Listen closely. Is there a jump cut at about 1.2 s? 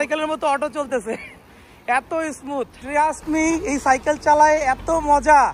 no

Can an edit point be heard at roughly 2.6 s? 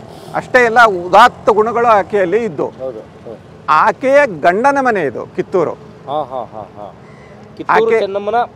no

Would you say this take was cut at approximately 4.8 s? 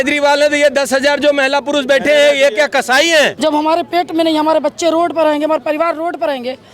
no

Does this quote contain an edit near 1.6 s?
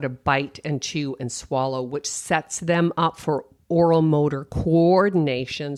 no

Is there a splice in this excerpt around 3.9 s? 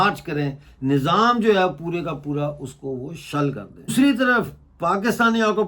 yes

